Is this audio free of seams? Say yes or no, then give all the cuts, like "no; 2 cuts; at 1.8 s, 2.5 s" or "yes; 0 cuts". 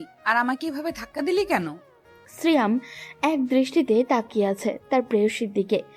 yes; 0 cuts